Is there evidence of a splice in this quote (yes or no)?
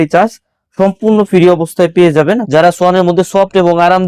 yes